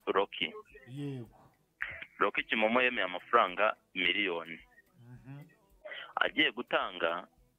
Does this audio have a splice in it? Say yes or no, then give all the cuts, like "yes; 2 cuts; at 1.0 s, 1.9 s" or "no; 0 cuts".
no; 0 cuts